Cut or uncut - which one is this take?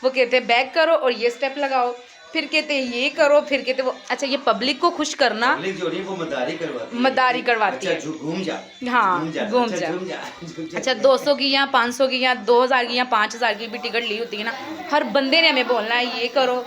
uncut